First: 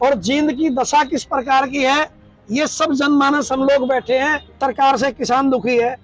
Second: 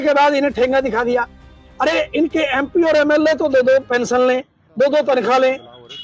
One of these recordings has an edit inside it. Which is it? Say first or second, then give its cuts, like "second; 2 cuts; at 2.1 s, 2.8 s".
first; 1 cut; at 4.6 s